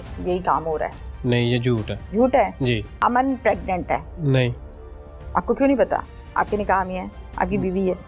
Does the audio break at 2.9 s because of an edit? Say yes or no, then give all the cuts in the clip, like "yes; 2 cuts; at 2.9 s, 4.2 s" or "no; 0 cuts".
yes; 3 cuts; at 2.0 s, 2.9 s, 4.1 s